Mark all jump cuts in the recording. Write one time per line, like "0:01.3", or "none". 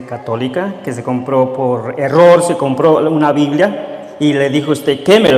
none